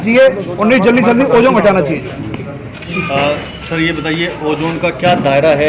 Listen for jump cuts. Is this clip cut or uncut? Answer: uncut